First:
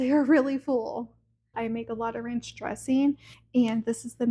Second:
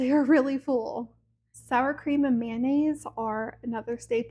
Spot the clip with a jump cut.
first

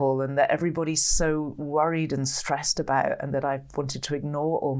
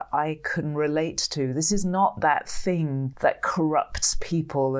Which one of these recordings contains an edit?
second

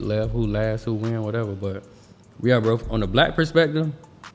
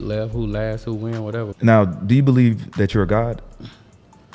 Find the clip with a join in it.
second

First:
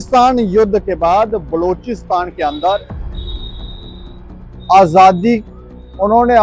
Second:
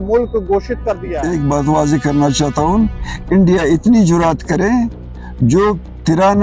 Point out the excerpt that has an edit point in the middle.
second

